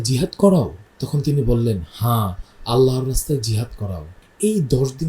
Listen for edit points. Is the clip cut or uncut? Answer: cut